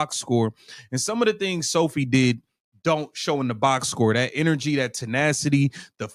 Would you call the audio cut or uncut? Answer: uncut